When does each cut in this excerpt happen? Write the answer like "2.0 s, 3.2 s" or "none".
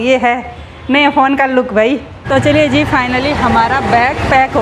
2.2 s